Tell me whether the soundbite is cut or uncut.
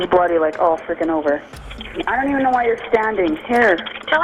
cut